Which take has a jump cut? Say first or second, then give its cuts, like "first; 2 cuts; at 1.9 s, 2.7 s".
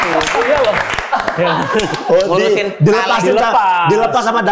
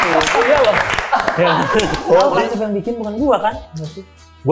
second; 1 cut; at 2.2 s